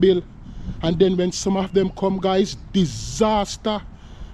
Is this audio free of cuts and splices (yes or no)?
yes